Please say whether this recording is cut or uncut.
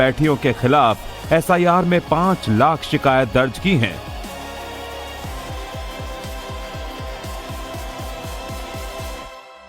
cut